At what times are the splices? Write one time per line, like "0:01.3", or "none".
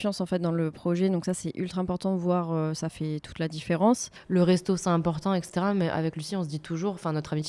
0:04.1